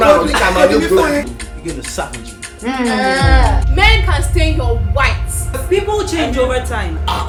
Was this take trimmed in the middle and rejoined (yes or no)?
no